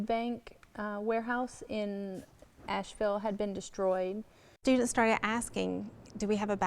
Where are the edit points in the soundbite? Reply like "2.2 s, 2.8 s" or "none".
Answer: 4.6 s